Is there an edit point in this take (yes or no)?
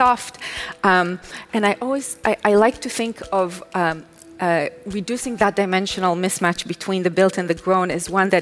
no